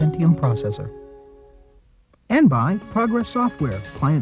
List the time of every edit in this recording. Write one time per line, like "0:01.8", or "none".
0:02.3

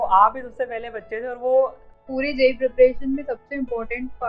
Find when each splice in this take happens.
0:01.9

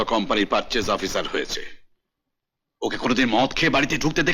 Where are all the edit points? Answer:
none

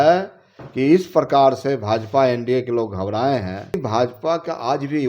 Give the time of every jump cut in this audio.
0:03.8

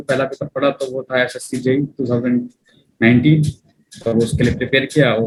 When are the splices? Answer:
none

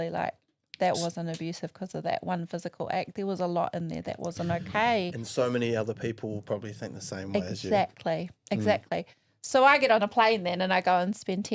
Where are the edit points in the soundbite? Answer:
none

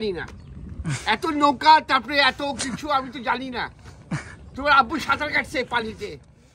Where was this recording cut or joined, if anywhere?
none

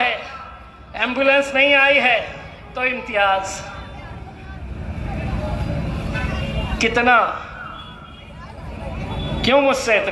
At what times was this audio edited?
none

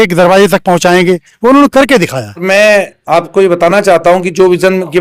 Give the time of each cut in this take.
0:02.4

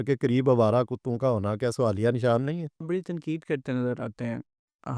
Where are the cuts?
0:02.8

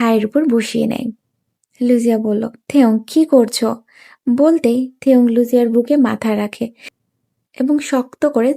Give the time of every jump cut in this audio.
0:07.0

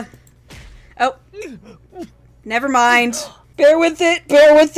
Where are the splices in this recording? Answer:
0:03.5

